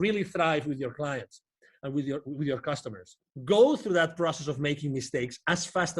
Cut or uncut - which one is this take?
cut